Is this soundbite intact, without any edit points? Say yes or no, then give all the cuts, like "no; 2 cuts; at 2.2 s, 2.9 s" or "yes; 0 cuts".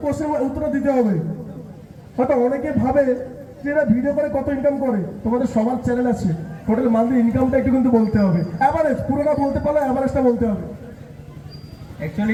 yes; 0 cuts